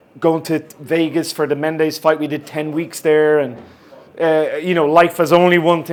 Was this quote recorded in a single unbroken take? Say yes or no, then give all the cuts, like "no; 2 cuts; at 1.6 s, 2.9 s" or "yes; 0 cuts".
yes; 0 cuts